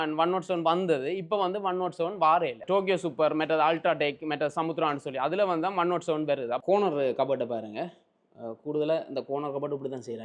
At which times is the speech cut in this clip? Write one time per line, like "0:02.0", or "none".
0:02.6
0:06.6